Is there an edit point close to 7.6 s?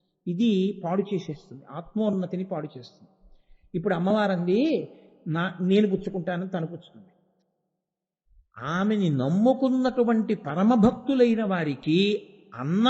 yes; 1 cut; at 7.6 s

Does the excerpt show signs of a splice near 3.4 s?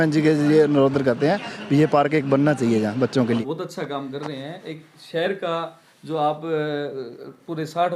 yes; 1 cut; at 3.4 s

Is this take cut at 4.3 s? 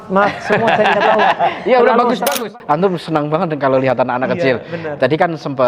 no; 1 cut; at 2.5 s

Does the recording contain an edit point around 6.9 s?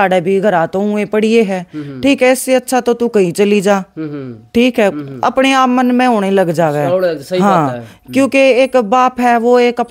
no; 0 cuts

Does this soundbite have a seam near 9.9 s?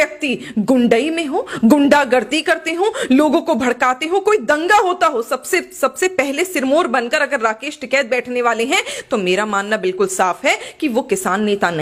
no; 0 cuts

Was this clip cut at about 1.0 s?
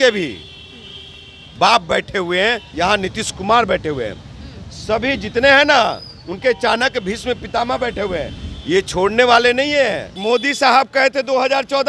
no; 2 cuts; at 2.7 s, 10.1 s

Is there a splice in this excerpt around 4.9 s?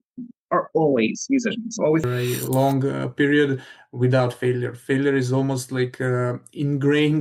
no; 1 cut; at 2.1 s

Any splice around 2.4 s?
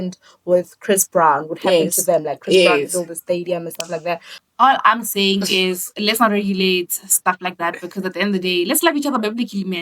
no; 1 cut; at 4.3 s

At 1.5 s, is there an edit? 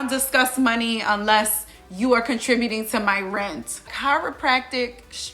no; 1 cut; at 3.9 s

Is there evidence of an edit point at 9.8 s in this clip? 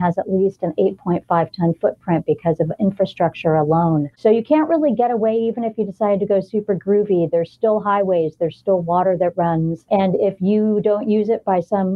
no; 0 cuts

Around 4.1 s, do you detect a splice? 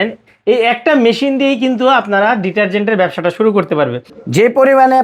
yes; 1 cut; at 4.1 s

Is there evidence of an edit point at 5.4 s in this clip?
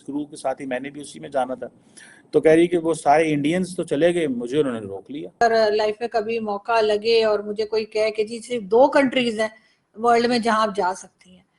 yes; 1 cut; at 5.4 s

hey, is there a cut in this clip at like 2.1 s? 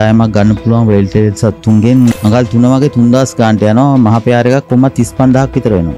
yes; 1 cut; at 2.1 s

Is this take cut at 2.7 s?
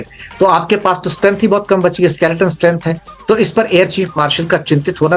no; 0 cuts

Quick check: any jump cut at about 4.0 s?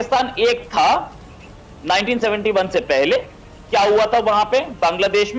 no; 0 cuts

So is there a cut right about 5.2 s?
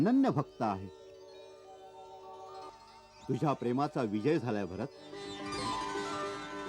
yes; 2 cuts; at 2.7 s, 5.2 s

